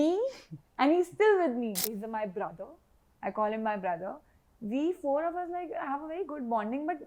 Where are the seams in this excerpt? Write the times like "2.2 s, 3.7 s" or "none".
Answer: 1.8 s